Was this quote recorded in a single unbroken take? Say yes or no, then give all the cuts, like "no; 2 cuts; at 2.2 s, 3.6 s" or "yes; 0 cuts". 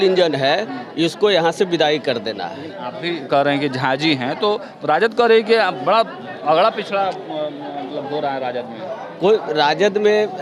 yes; 0 cuts